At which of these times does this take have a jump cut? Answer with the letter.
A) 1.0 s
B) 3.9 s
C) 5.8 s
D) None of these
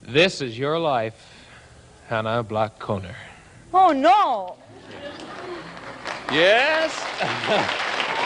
D